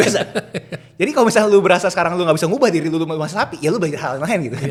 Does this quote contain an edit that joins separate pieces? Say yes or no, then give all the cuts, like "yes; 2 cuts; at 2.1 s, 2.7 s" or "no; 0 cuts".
no; 0 cuts